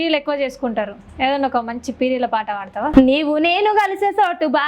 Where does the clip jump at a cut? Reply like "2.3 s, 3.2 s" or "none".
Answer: 2.9 s